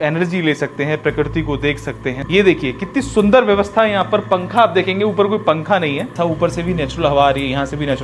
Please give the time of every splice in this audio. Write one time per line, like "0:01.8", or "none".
0:02.1
0:06.1